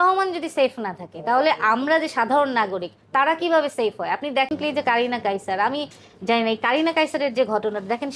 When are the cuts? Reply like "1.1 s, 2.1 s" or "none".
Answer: 4.5 s